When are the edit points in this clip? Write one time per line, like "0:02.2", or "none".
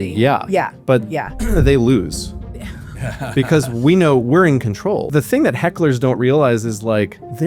0:05.1